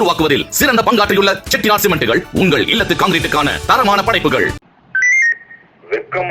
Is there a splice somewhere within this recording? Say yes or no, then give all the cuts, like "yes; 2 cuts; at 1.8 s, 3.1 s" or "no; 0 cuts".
yes; 1 cut; at 4.6 s